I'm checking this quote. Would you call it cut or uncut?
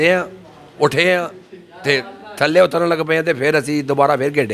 uncut